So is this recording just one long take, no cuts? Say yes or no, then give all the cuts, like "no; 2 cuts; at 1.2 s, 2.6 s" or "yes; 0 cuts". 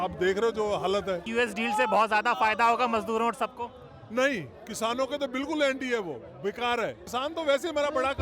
no; 2 cuts; at 1.3 s, 7.0 s